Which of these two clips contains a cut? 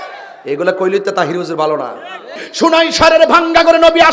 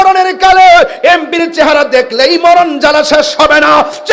first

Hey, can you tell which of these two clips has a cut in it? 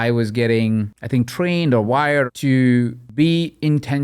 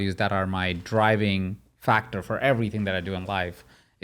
first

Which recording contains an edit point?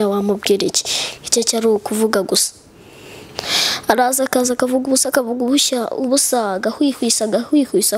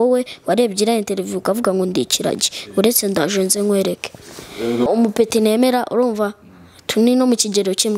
second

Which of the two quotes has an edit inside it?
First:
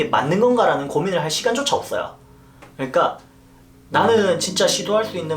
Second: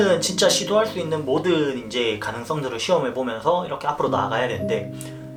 first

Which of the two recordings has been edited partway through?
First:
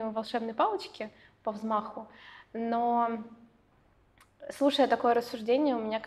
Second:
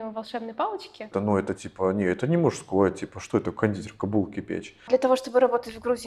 second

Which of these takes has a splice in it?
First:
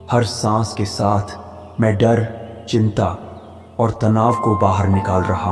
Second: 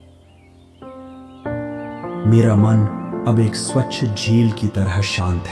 second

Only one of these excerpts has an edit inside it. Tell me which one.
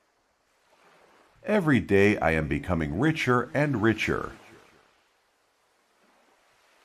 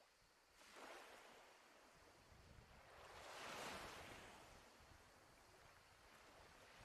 first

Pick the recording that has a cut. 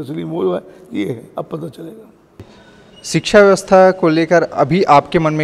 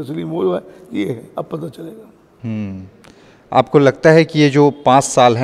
first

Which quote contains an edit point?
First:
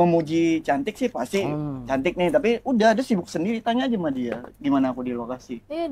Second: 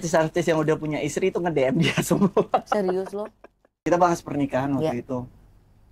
second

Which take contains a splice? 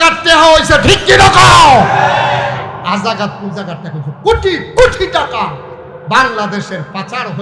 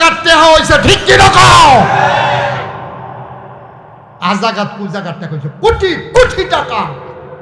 first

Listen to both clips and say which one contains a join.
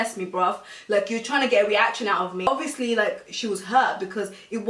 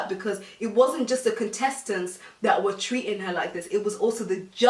first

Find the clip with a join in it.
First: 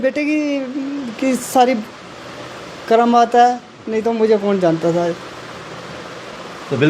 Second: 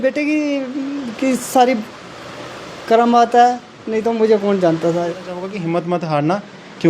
second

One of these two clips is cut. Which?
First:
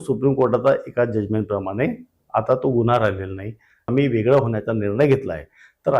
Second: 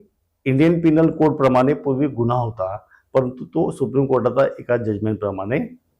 first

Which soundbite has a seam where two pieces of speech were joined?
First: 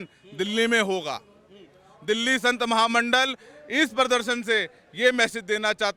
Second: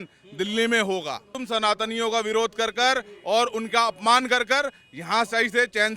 second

